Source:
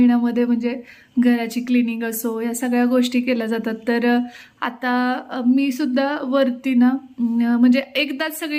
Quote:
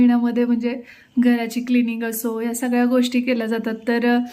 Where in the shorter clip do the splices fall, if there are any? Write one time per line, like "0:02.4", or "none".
none